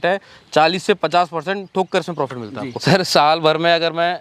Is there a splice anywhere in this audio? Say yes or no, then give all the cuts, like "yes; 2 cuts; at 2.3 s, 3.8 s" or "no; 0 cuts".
yes; 1 cut; at 2.8 s